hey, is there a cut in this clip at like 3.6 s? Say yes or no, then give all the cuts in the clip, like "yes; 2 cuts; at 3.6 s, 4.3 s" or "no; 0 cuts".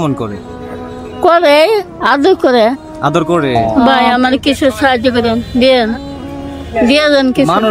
yes; 1 cut; at 3.6 s